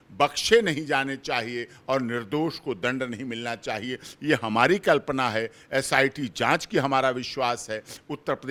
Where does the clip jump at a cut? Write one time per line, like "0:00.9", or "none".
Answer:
none